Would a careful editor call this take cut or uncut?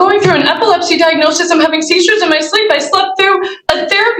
uncut